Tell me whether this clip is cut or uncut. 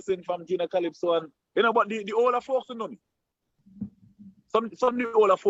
uncut